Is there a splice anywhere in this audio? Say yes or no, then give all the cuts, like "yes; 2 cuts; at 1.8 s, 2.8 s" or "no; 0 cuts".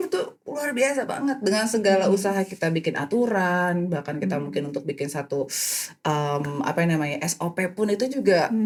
no; 0 cuts